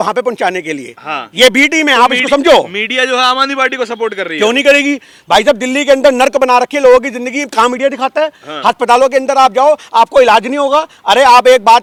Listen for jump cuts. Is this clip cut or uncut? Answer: uncut